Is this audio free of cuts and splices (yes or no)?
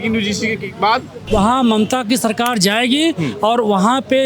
no